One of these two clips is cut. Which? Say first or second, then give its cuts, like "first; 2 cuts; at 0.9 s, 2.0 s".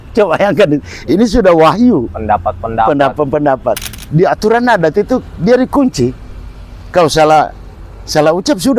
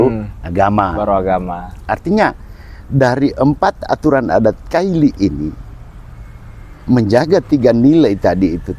first; 1 cut; at 3.9 s